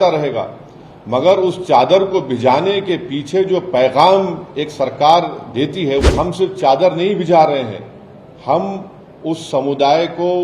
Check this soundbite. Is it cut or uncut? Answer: cut